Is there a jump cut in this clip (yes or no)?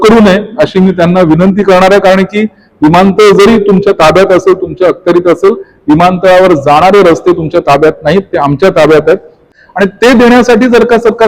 yes